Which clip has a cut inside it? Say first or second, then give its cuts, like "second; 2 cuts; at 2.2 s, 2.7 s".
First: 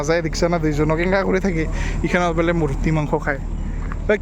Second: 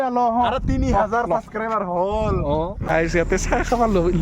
second; 1 cut; at 2.8 s